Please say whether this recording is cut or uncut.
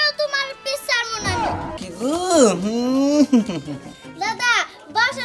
cut